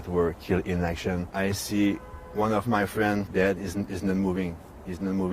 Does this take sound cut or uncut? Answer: cut